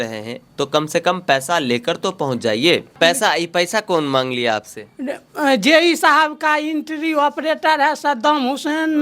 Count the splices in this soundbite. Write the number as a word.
one